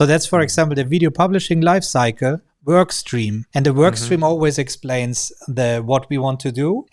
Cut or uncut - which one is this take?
cut